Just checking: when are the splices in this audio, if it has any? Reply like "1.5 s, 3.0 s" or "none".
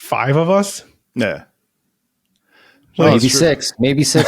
none